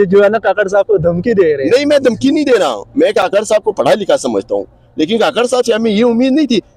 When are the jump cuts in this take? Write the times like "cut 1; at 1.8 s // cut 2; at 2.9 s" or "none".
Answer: none